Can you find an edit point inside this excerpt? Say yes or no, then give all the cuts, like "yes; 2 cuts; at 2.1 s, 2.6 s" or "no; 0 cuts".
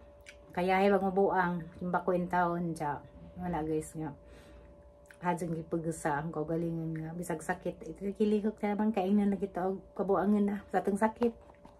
no; 0 cuts